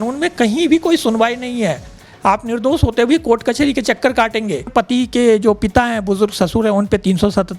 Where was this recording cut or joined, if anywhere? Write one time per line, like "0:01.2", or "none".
0:04.7